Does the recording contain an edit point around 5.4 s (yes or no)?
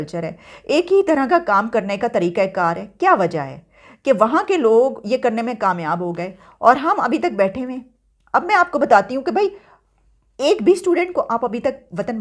no